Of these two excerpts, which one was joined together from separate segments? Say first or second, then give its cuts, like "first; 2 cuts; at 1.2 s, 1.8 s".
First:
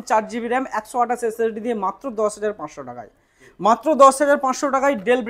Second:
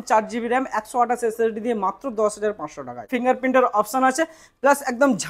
second; 1 cut; at 3.1 s